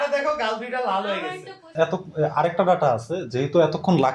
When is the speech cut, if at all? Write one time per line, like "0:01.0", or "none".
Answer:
0:01.6